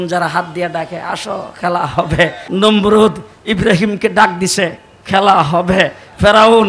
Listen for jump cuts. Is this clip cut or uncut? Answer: cut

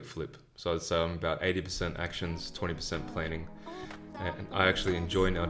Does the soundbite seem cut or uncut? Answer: uncut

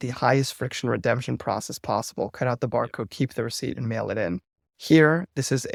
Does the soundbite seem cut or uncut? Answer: uncut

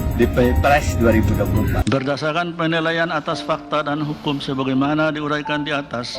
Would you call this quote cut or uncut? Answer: cut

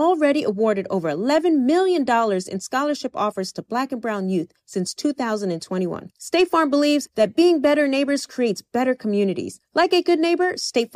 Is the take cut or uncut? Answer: uncut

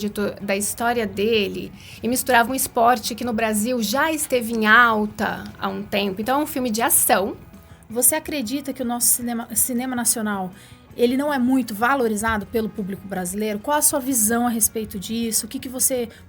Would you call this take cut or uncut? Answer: cut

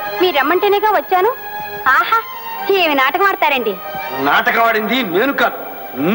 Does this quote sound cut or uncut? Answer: uncut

